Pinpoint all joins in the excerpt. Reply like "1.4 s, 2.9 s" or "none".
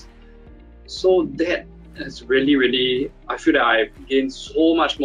4.0 s